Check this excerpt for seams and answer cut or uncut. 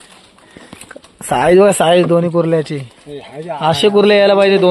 uncut